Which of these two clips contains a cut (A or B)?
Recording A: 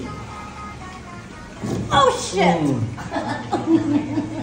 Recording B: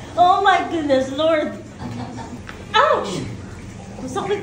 B